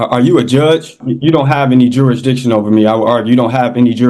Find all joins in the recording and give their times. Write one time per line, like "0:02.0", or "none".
0:01.0